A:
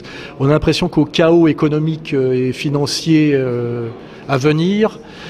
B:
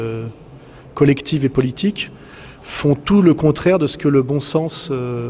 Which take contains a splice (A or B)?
B